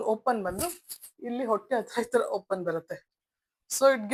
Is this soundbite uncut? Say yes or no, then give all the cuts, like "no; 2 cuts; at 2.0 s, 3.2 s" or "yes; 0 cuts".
yes; 0 cuts